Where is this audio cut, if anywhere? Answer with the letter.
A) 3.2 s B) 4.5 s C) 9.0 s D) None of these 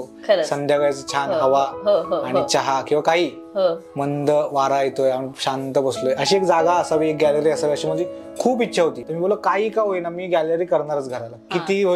C